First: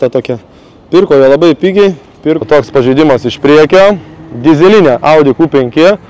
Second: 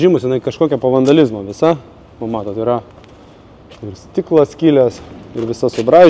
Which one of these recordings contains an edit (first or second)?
first